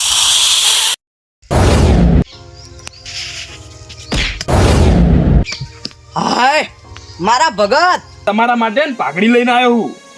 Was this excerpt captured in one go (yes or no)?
no